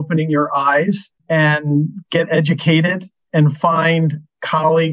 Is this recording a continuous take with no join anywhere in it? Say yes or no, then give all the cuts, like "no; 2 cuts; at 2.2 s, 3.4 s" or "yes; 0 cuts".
yes; 0 cuts